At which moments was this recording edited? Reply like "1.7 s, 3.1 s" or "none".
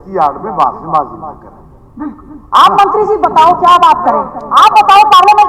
none